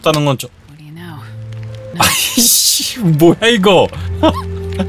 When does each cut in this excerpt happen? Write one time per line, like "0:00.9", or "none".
0:01.9